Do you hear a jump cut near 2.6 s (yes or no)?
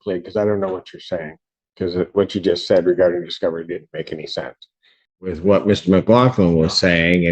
no